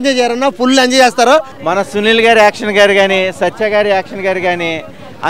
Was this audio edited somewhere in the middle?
yes; 1 cut; at 1.5 s

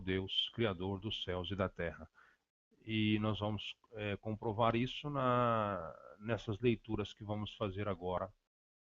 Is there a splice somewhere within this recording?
yes; 1 cut; at 5.5 s

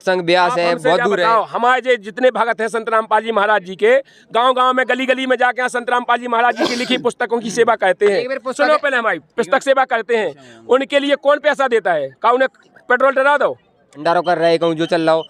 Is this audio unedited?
no; 1 cut; at 13.9 s

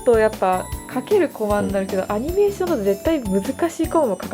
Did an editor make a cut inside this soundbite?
no; 0 cuts

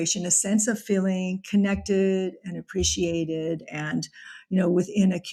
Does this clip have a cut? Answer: no; 0 cuts

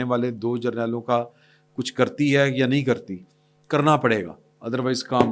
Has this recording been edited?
no; 0 cuts

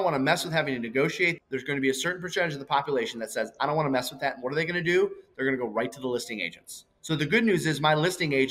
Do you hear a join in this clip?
yes; 1 cut; at 1.4 s

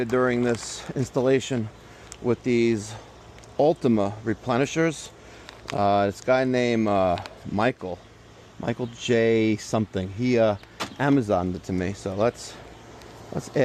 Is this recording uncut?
yes; 0 cuts

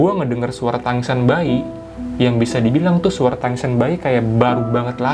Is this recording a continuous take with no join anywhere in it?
yes; 0 cuts

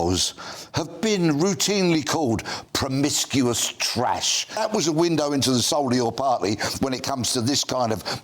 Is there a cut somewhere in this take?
yes; 1 cut; at 4.6 s

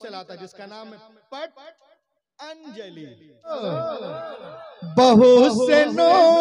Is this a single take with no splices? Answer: no; 1 cut; at 3.6 s

